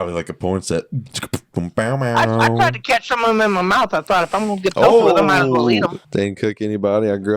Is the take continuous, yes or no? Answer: no